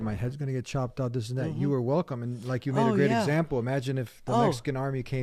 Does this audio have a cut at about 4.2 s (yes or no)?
no